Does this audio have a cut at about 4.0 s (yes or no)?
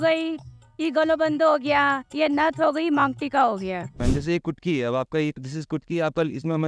yes